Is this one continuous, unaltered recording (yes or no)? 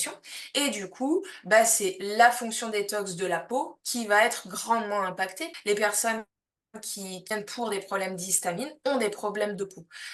no